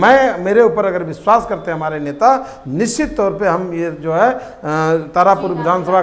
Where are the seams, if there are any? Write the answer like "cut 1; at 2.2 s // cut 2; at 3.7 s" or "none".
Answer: none